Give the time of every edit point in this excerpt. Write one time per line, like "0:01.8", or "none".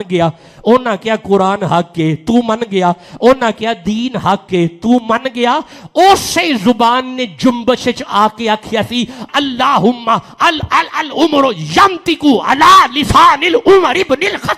0:09.3